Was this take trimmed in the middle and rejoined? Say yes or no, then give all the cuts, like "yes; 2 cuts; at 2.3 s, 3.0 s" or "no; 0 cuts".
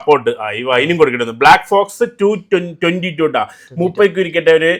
no; 0 cuts